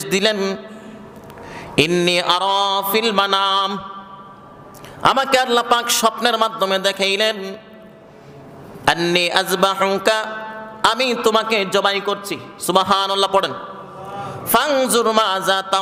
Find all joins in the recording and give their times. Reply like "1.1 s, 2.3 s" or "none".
none